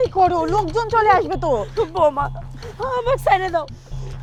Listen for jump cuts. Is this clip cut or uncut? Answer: uncut